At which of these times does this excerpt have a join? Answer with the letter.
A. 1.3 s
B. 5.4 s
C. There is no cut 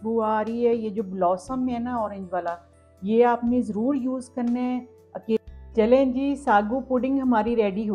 B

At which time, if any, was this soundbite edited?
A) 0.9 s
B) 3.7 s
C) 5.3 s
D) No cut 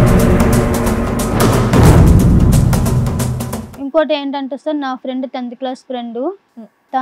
B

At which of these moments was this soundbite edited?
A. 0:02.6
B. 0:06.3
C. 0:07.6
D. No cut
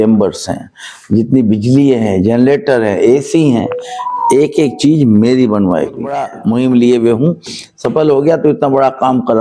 B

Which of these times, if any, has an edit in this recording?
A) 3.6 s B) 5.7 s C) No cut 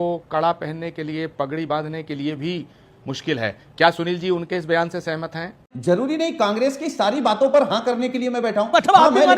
B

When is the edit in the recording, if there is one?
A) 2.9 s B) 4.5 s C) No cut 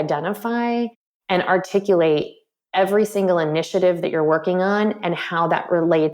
C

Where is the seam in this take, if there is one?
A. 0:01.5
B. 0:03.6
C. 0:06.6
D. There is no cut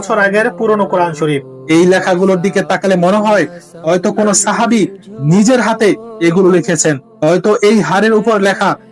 A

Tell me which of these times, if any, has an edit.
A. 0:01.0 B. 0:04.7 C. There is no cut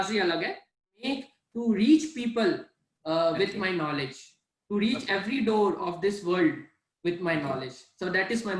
A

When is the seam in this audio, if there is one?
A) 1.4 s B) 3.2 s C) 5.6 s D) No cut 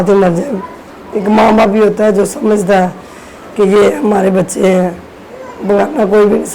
D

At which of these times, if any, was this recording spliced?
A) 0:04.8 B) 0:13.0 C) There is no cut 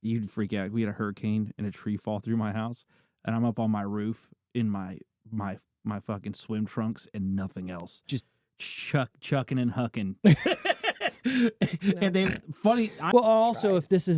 B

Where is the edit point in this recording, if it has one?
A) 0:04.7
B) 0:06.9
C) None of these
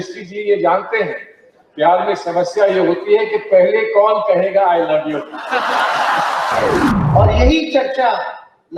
B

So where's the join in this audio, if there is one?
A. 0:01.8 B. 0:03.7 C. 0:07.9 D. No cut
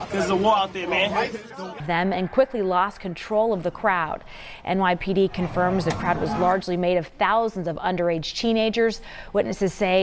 A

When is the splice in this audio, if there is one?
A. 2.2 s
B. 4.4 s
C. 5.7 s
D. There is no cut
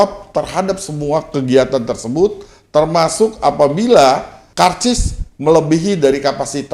B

